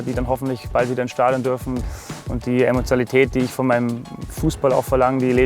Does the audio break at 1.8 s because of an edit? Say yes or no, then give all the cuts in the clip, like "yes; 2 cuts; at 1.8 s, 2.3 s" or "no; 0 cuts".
yes; 1 cut; at 1.8 s